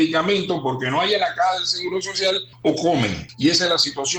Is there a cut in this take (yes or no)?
yes